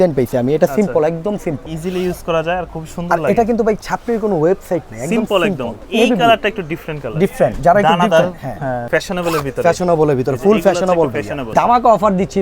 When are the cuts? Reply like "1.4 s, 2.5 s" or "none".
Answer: 1.7 s, 5.8 s, 8.8 s, 11.5 s

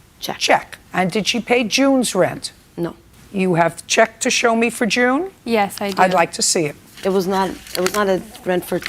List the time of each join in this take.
7.2 s

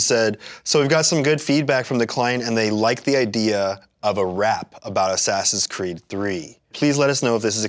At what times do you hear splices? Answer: 6.7 s

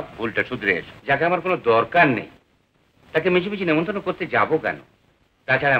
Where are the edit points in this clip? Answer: 0.9 s

